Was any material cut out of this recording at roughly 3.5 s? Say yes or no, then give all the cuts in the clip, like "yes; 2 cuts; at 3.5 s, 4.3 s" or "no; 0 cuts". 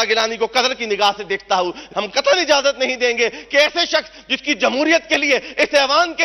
no; 1 cut; at 1.9 s